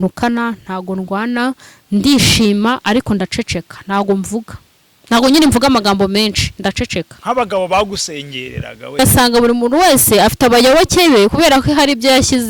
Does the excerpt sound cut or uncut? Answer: cut